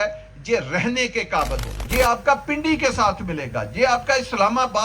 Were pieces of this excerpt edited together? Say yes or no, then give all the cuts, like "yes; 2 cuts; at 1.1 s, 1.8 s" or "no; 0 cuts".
yes; 1 cut; at 1.9 s